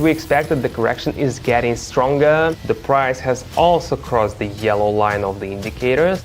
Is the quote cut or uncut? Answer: cut